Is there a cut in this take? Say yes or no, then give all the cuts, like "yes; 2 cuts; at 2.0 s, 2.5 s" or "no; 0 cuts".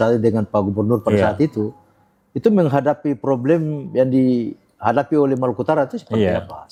no; 0 cuts